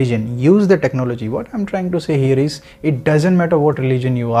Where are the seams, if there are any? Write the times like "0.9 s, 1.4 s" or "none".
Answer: none